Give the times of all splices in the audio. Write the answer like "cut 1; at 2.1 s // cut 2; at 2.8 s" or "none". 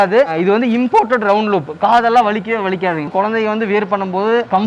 cut 1; at 3.1 s